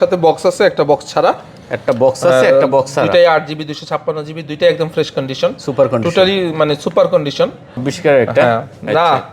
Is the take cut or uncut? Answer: cut